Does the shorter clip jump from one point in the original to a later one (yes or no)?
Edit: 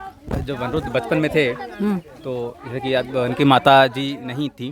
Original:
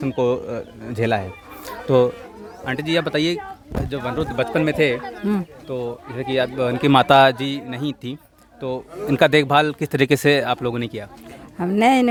no